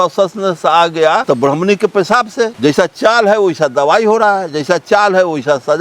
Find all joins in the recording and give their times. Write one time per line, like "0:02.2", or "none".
0:01.2
0:02.5